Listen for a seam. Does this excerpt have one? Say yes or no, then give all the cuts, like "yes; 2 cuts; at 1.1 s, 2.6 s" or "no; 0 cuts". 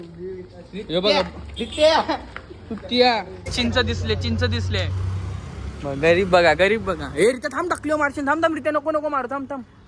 yes; 1 cut; at 3.4 s